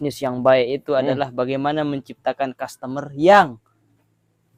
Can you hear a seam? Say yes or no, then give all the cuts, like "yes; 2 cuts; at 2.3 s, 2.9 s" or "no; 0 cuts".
no; 0 cuts